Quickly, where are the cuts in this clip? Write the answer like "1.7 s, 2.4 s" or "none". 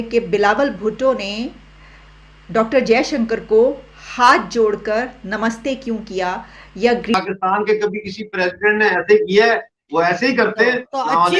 7.1 s